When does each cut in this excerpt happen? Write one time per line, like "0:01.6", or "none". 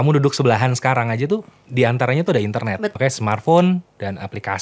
0:02.9